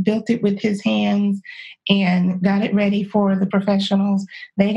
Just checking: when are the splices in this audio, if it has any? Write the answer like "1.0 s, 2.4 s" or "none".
3.5 s